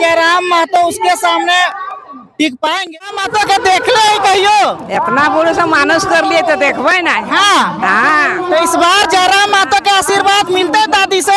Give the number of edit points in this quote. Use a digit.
1